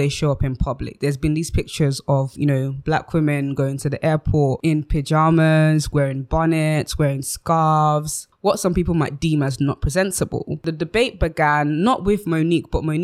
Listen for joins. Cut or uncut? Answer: uncut